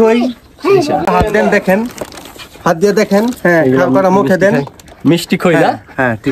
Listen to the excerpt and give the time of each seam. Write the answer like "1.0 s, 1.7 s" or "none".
1.1 s